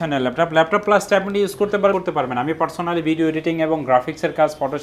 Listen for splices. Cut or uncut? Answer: cut